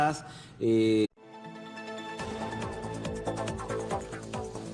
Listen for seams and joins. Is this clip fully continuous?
yes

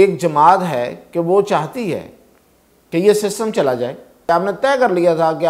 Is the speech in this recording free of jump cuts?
no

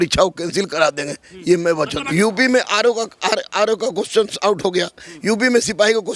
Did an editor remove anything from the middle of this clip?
yes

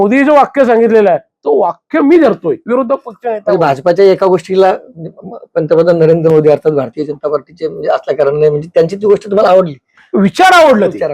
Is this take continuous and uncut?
yes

